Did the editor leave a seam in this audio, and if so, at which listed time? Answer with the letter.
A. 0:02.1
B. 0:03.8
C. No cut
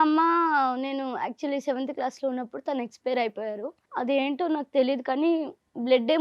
B